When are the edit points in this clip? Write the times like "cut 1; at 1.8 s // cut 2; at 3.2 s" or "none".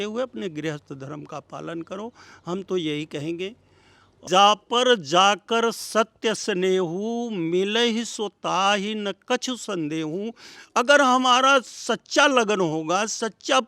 cut 1; at 4.2 s